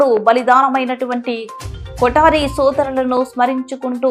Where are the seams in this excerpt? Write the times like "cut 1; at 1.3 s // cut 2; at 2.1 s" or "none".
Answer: none